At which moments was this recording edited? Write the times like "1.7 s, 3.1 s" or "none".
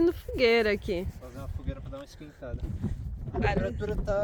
none